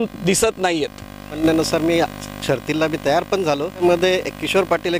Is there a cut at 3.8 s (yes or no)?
yes